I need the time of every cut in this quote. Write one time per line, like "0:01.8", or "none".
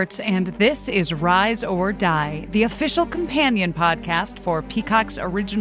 none

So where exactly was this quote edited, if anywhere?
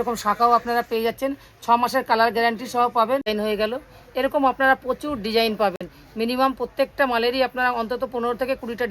0:03.3

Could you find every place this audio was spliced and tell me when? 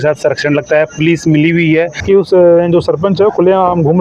0:02.0

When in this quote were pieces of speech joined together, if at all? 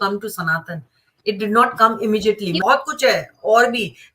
0:02.6

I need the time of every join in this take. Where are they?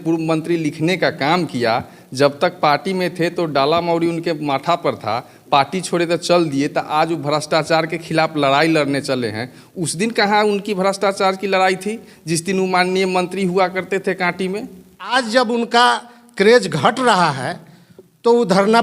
0:15.1

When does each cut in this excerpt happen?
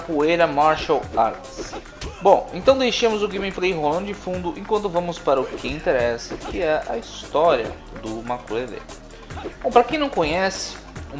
0:07.1

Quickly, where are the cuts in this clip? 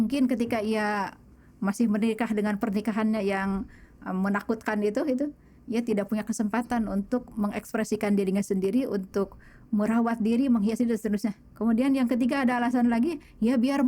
0:11.5

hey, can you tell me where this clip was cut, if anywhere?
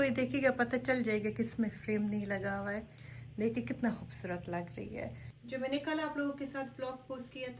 none

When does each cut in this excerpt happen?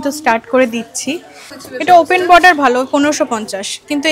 0:01.8

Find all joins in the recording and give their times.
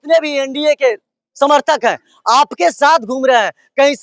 none

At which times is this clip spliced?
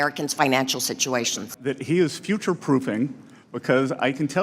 0:01.4

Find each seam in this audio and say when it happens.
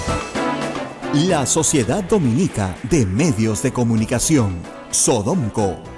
0:00.9

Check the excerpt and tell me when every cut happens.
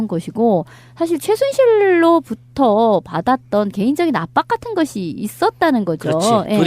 0:02.8

